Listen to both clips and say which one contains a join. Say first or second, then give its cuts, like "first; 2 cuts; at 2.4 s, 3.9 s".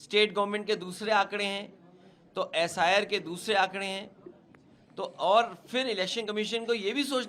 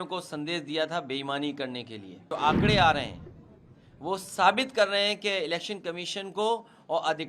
second; 1 cut; at 2.3 s